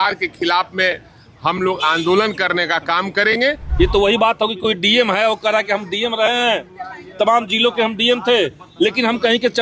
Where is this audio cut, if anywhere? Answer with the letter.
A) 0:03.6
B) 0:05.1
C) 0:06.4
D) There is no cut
A